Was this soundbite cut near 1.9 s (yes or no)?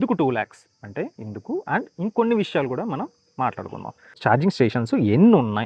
no